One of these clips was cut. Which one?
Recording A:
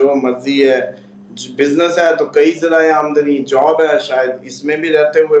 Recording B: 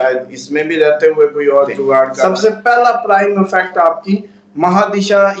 B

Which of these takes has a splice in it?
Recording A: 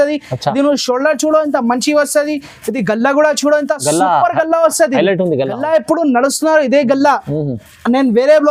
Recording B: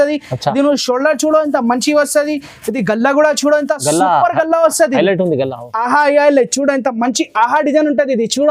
B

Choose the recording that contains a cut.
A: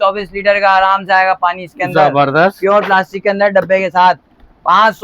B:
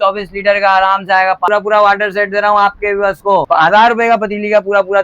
B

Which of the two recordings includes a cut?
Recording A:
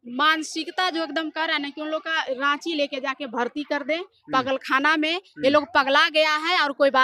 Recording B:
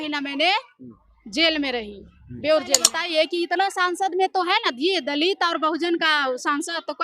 B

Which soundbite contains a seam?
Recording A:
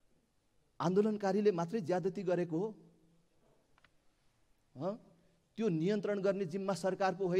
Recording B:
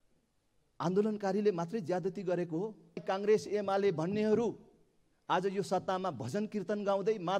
B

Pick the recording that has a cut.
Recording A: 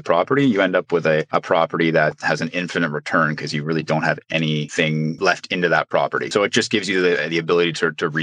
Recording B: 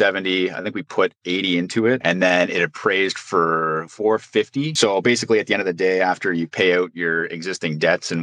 B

